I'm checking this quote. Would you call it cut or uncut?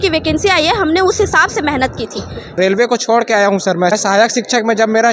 cut